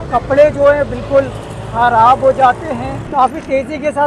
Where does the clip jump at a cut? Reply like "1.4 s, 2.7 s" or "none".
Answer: 2.9 s